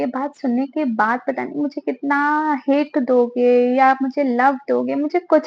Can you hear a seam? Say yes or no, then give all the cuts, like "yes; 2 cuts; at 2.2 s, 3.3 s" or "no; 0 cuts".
no; 0 cuts